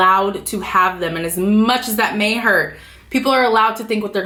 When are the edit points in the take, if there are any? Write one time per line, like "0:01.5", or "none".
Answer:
none

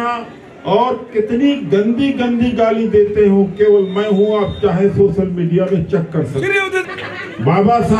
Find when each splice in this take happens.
0:06.8

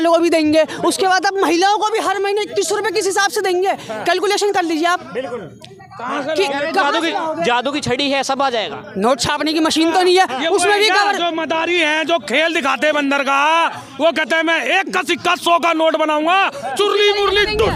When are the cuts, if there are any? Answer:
none

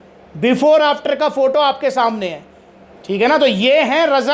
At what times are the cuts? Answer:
none

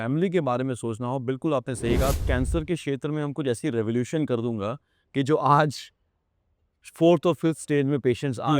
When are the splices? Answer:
0:02.2

